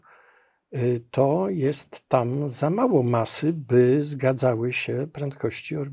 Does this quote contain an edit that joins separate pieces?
no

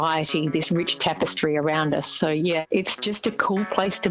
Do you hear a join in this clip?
yes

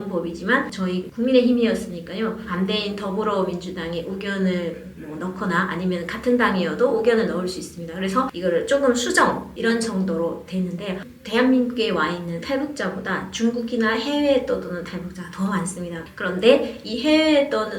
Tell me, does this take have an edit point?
yes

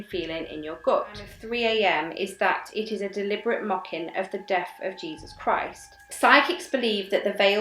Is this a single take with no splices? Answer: no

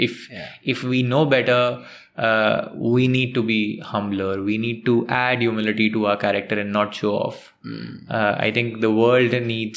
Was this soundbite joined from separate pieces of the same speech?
no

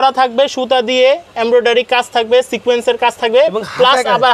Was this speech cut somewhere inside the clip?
no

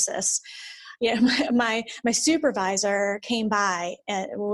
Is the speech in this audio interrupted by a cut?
no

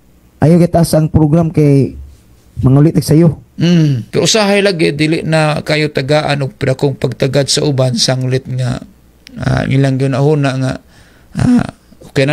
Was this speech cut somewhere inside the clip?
yes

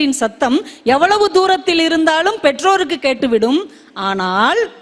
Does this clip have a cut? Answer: no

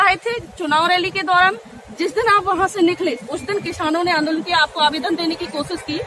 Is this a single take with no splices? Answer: yes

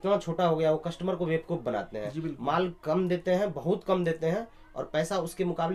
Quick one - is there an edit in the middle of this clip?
no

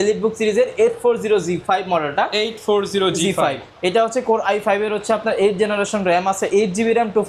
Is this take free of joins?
yes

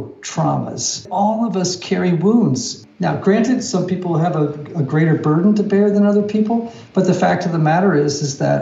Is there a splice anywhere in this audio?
yes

